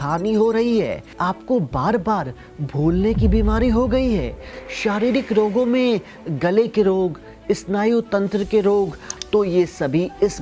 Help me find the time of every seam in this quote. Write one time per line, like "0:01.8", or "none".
0:01.1
0:04.5
0:09.1